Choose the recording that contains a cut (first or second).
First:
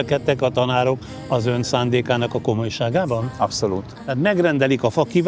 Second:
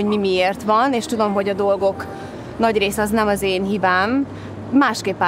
first